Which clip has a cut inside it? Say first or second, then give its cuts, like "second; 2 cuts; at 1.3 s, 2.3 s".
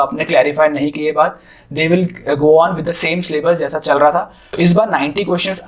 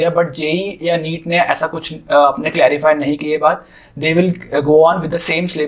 first; 1 cut; at 4.4 s